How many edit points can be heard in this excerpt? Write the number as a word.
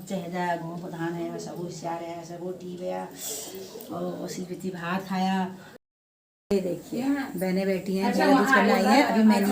one